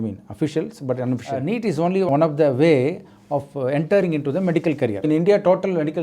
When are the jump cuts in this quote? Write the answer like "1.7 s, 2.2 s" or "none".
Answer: 1.3 s, 5.0 s